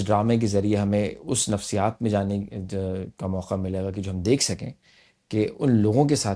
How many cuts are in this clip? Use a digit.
0